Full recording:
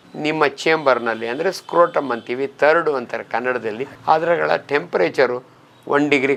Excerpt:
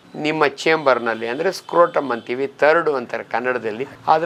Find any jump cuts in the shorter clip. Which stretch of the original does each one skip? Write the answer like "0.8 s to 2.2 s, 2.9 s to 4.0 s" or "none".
none